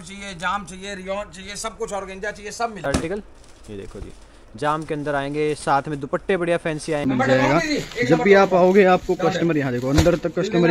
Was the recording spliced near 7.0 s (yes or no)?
yes